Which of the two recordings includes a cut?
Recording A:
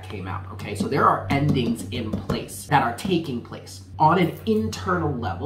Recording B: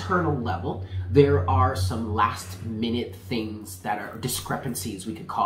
A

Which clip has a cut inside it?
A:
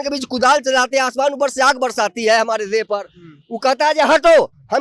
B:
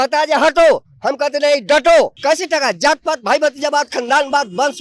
B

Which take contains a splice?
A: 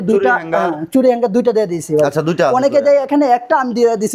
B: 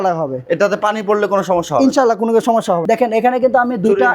B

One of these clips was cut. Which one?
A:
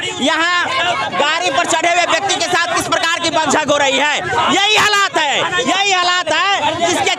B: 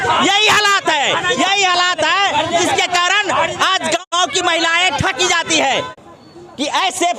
B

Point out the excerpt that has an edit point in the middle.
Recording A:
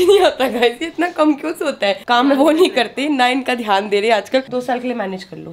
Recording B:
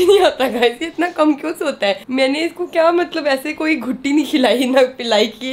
A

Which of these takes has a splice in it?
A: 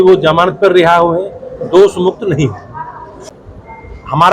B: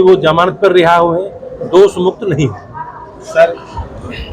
A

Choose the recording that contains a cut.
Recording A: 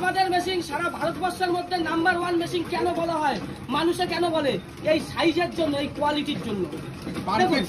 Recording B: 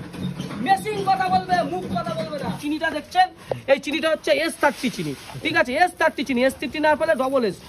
B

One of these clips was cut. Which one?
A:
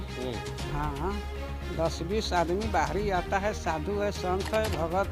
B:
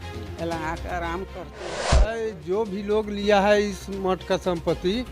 B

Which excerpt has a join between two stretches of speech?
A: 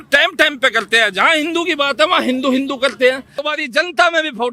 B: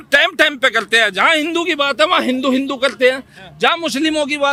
A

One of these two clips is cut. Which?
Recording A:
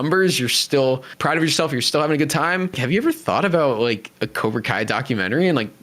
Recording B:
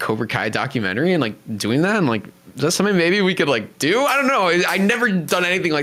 A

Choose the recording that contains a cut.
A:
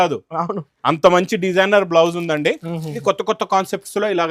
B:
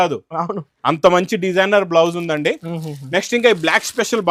A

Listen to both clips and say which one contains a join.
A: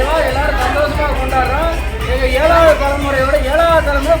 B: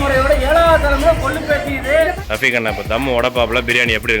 B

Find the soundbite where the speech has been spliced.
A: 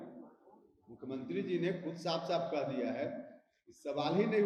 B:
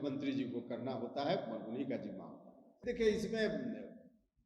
B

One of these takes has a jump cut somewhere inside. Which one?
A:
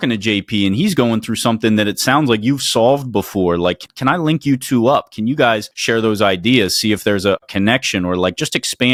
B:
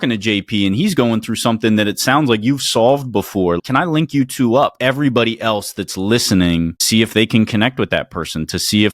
B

